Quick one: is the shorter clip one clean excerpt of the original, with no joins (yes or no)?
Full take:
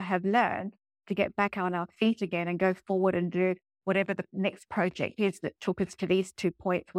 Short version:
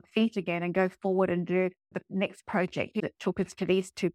no